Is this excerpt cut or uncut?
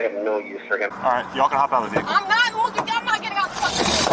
cut